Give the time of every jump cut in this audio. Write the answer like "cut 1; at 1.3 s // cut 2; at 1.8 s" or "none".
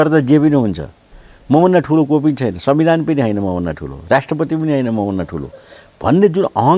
none

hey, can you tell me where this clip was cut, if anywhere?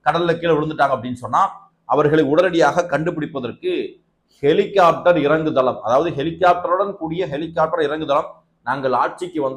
none

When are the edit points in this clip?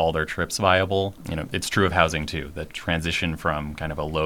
cut 1; at 1.2 s

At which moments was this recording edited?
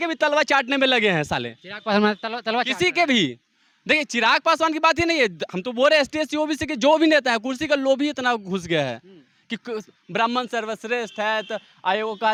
none

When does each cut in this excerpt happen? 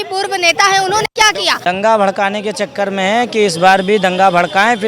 cut 1; at 1.5 s

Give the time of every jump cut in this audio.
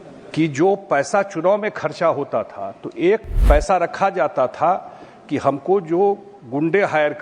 cut 1; at 3.3 s

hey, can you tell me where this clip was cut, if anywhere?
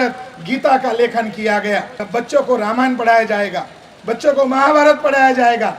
cut 1; at 2.0 s

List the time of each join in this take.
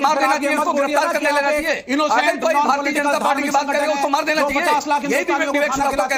none

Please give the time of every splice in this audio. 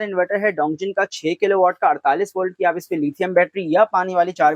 none

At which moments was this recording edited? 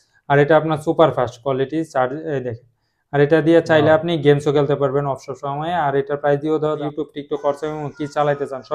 cut 1; at 6.8 s

